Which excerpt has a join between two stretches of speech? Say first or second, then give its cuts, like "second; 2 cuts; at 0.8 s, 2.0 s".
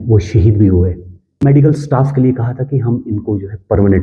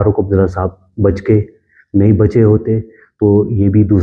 first; 1 cut; at 1.4 s